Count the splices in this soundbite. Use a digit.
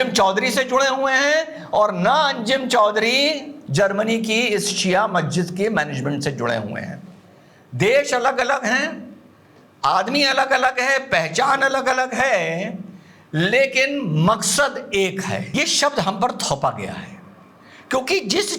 1